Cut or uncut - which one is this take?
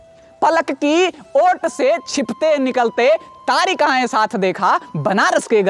uncut